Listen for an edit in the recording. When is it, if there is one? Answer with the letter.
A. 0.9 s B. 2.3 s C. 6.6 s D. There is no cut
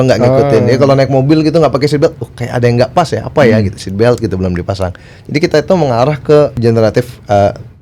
C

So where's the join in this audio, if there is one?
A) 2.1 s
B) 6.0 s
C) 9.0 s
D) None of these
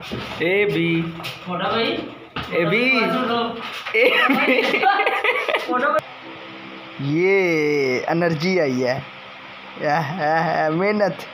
B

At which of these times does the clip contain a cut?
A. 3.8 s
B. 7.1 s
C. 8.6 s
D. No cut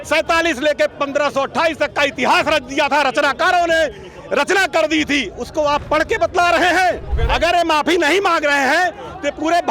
B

